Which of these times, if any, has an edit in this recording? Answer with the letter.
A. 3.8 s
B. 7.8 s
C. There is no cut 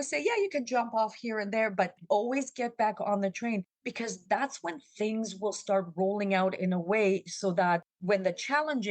A